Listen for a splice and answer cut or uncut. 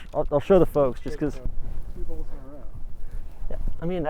uncut